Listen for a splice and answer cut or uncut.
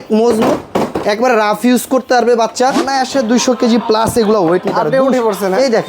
cut